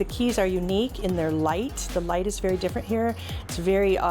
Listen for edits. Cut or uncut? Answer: uncut